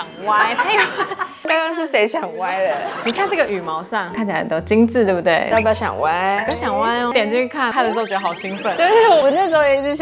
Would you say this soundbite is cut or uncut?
uncut